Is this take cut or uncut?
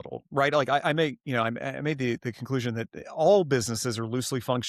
uncut